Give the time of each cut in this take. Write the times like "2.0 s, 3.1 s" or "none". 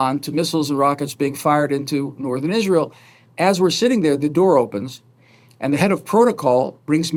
none